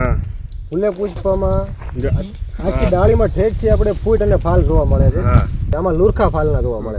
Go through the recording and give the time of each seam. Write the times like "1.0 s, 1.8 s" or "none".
5.7 s